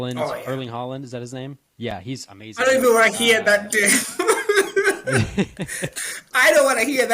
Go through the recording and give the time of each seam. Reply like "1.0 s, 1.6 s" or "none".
5.9 s